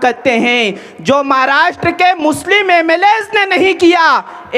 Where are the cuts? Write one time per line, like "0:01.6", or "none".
none

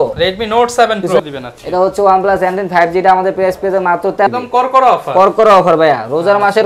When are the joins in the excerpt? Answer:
0:01.2
0:04.3

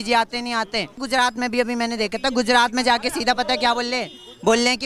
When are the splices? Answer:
0:01.0

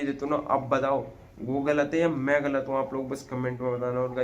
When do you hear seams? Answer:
none

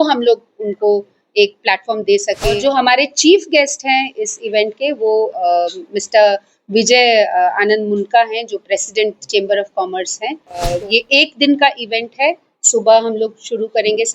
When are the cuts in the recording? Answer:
0:02.6
0:10.8

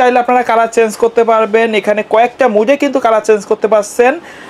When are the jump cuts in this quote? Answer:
none

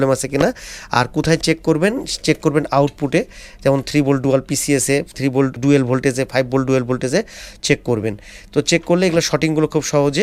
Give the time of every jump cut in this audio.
none

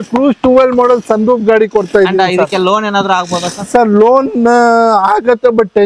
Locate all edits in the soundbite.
none

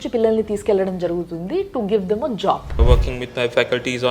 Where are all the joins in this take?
0:02.8

